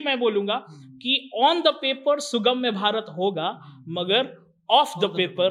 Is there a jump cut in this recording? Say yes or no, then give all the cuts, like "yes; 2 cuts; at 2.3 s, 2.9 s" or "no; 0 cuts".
no; 0 cuts